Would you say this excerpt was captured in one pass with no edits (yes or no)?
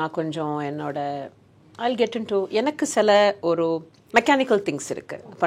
no